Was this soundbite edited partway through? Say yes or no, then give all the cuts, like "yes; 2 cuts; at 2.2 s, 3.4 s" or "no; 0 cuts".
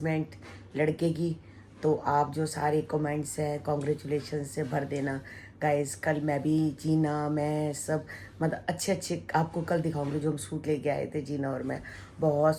no; 0 cuts